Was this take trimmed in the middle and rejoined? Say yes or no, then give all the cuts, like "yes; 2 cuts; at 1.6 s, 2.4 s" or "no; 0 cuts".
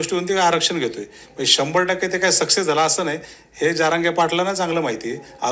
no; 0 cuts